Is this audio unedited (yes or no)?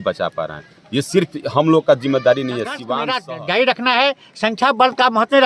no